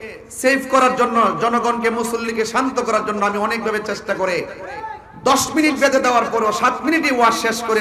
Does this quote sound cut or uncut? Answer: uncut